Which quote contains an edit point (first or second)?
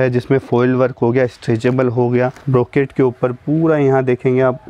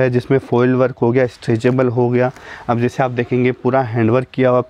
first